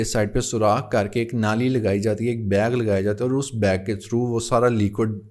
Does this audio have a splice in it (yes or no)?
no